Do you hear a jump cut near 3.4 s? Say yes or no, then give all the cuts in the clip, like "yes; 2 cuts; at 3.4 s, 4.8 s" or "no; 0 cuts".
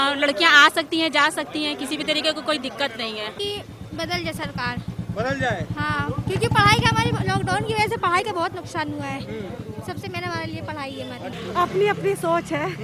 yes; 2 cuts; at 3.4 s, 11.4 s